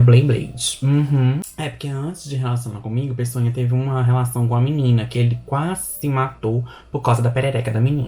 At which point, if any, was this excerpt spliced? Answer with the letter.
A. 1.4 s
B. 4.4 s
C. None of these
A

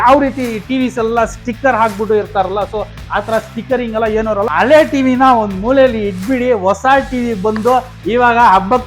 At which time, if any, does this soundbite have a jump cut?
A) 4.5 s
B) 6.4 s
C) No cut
A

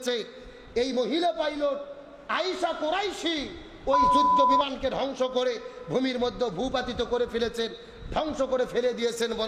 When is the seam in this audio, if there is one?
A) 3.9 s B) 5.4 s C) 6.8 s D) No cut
D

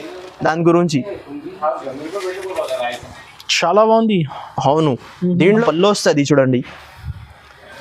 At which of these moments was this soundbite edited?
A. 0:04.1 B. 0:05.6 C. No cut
B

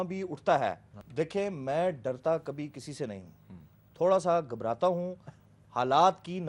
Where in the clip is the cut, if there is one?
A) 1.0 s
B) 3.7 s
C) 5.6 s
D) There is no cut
A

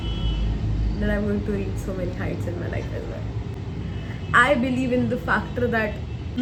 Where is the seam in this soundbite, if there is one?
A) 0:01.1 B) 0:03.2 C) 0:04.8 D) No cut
D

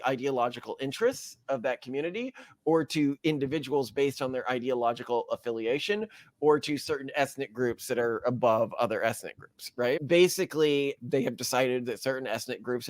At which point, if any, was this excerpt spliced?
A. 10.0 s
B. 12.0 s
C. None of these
A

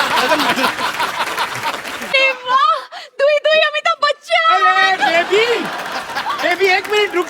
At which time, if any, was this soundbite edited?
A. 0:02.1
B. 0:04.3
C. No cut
A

